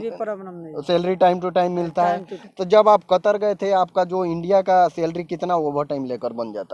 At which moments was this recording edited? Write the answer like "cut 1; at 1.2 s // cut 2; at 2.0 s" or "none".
cut 1; at 2.3 s